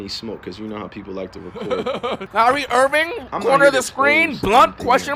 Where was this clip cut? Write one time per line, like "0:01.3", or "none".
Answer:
0:02.2